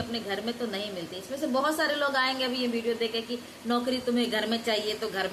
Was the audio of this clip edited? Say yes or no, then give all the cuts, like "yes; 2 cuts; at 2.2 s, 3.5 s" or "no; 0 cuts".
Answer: no; 0 cuts